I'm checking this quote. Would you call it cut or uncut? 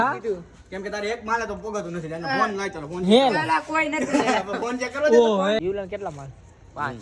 cut